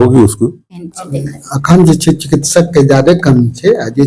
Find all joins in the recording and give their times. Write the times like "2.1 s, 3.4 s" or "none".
1.0 s